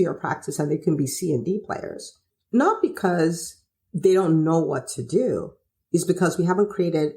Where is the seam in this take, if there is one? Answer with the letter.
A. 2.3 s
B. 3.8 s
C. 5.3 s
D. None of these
D